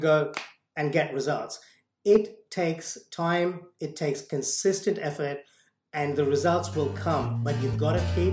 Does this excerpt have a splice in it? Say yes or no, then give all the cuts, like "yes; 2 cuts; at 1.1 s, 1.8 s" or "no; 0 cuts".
no; 0 cuts